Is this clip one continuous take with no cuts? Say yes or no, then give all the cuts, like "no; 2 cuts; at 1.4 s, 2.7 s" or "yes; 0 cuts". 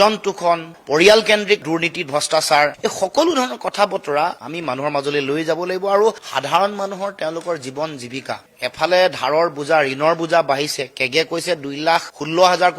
yes; 0 cuts